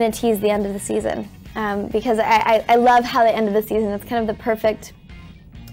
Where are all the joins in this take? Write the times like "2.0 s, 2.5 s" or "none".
none